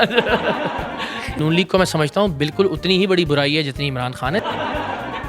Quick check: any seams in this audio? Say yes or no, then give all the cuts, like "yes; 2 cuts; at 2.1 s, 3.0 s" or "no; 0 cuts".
yes; 2 cuts; at 1.4 s, 4.4 s